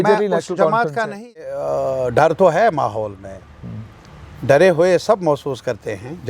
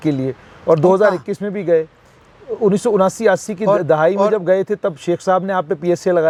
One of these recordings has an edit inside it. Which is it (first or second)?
first